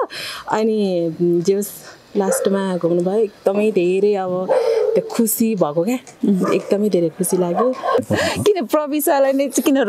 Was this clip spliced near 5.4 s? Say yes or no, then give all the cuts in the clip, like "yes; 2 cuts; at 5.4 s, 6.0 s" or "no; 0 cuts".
no; 1 cut; at 8.0 s